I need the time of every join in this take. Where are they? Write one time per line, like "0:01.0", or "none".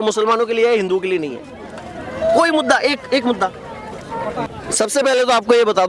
0:04.4

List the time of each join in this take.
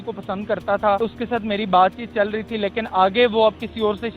0:01.0

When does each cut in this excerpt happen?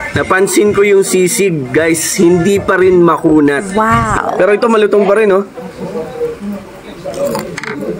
0:04.1

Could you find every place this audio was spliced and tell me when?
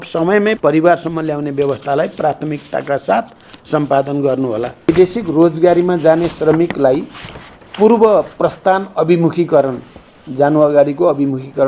0:04.9

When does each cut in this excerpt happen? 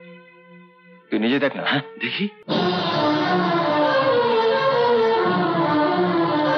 0:02.4

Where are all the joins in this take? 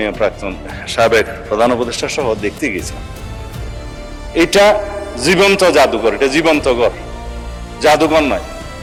none

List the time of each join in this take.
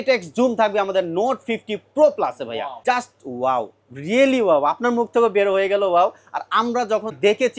none

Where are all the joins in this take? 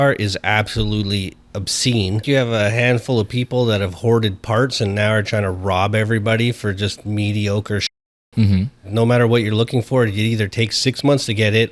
0:02.2
0:08.8

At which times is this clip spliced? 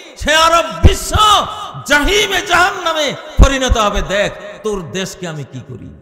none

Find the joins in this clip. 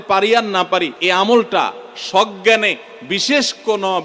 0:00.9

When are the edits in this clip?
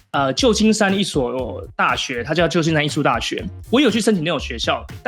0:03.5

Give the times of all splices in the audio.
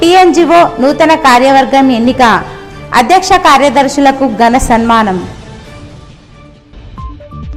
none

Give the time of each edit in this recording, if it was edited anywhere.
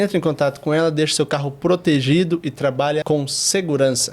0:03.0

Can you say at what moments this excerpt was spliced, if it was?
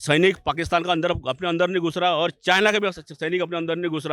none

